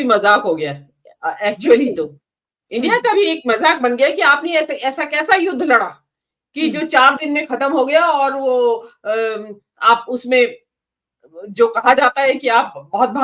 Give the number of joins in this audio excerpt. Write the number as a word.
zero